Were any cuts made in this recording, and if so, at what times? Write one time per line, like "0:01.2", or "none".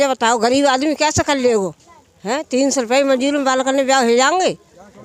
none